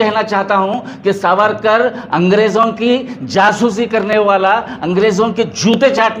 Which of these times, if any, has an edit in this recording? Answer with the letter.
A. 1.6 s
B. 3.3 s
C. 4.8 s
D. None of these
D